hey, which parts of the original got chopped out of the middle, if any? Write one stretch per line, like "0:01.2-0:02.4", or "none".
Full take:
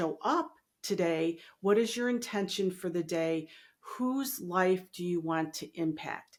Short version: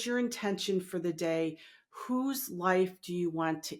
none